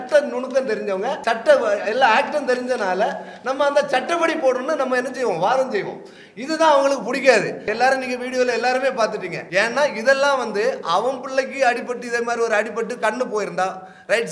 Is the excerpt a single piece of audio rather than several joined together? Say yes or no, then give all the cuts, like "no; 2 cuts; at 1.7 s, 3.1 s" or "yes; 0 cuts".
no; 3 cuts; at 1.2 s, 7.7 s, 9.3 s